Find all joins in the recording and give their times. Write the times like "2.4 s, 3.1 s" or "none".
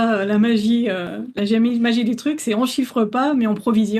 none

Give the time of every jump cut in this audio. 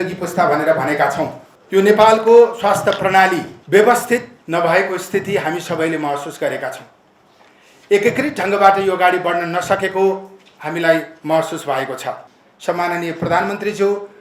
1.5 s, 3.5 s, 4.3 s, 12.2 s

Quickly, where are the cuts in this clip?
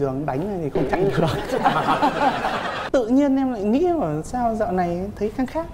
2.9 s

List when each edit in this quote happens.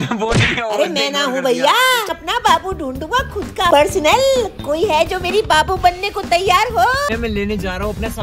2.1 s, 7.1 s

